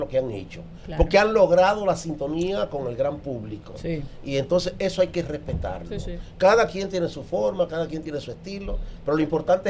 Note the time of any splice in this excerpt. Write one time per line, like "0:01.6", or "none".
none